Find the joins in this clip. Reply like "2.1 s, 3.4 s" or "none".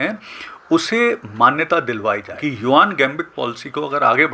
2.3 s